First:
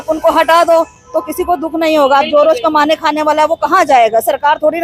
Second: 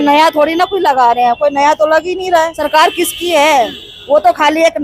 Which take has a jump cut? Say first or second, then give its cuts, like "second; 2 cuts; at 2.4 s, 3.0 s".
second; 1 cut; at 2.6 s